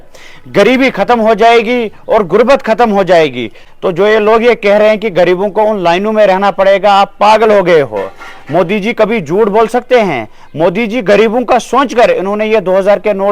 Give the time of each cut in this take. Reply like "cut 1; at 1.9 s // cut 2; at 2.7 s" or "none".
cut 1; at 3.6 s